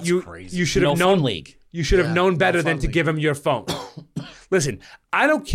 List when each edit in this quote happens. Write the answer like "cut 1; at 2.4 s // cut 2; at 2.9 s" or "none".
none